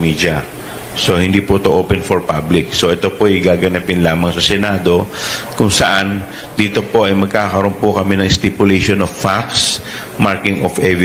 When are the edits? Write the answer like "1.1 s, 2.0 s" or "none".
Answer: none